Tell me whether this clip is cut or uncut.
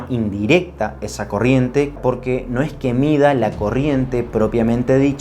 cut